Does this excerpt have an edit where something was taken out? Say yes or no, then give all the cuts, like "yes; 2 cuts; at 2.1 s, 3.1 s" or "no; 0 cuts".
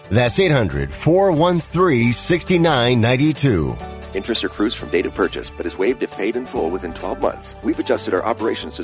yes; 1 cut; at 7.5 s